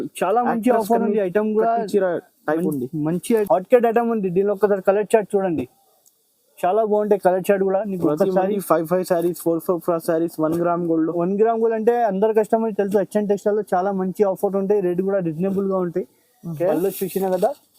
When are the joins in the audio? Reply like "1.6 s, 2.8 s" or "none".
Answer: 3.4 s, 16.5 s